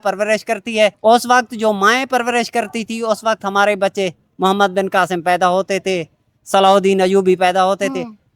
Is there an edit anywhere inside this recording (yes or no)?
yes